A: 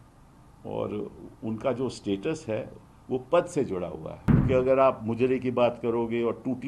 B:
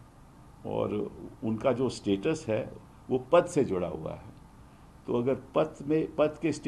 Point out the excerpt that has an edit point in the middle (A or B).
A